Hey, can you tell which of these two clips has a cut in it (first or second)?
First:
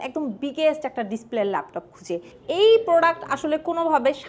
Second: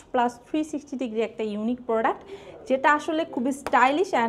first